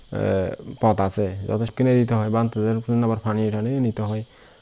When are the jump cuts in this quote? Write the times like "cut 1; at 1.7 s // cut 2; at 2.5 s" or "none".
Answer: cut 1; at 1.7 s